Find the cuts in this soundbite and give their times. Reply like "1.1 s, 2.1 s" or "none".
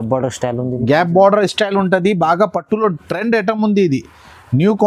none